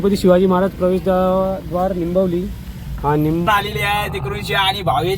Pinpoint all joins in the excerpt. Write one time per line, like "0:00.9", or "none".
0:03.5